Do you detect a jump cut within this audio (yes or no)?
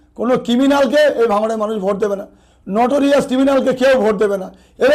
no